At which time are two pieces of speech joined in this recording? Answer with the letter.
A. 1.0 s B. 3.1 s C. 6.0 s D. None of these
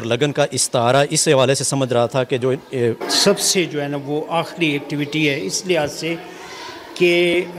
B